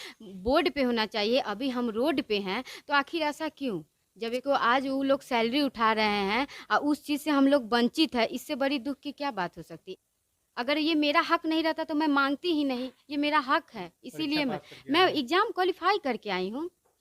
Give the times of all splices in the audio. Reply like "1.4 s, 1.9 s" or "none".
4.4 s, 9.8 s